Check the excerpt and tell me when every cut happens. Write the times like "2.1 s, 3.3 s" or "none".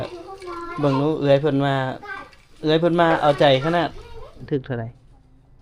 4.5 s